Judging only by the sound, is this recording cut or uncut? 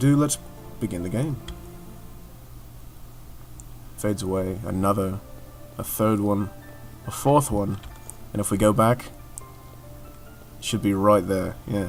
uncut